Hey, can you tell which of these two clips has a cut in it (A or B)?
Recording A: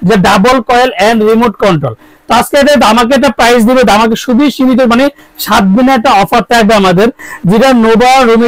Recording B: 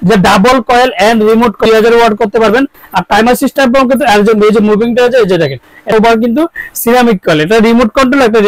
B